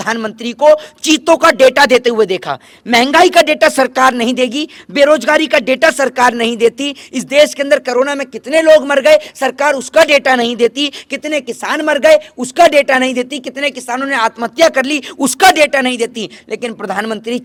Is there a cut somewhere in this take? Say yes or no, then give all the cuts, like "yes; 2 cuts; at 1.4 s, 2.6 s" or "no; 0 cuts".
no; 0 cuts